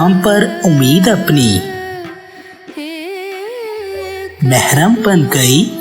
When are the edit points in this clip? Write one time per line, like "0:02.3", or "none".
0:02.3
0:04.3